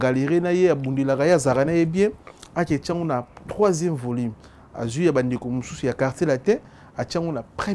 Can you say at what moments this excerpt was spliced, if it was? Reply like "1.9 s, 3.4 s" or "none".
none